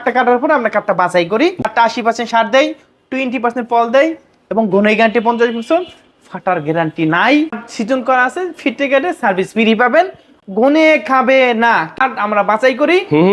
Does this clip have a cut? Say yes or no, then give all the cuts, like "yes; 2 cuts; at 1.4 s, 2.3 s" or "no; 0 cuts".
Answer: yes; 3 cuts; at 1.7 s, 7.5 s, 12.0 s